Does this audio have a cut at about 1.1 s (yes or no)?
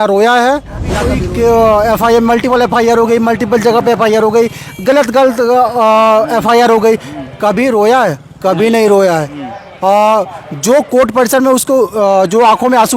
yes